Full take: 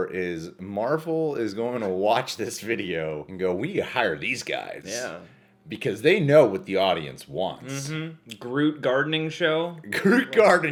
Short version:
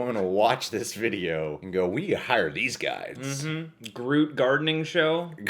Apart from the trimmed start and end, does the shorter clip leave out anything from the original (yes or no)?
yes